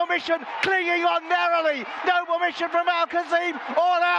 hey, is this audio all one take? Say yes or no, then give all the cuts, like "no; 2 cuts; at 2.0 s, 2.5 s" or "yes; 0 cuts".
yes; 0 cuts